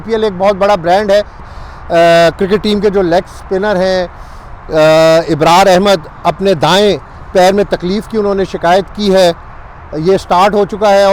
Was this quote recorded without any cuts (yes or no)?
no